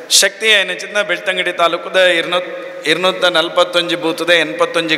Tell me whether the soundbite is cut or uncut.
uncut